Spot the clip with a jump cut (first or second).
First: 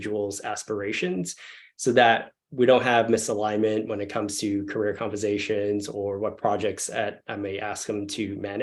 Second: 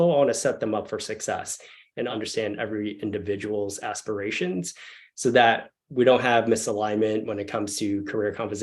second